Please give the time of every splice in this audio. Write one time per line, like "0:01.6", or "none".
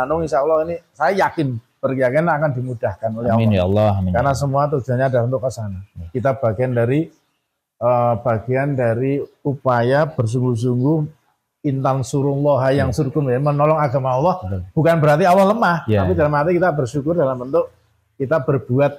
none